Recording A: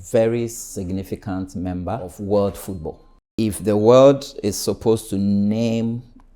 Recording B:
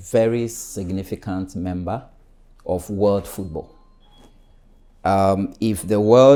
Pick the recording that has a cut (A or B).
A